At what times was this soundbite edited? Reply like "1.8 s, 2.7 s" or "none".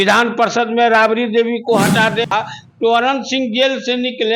2.3 s